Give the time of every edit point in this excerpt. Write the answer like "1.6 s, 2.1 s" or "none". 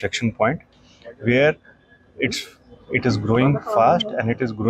none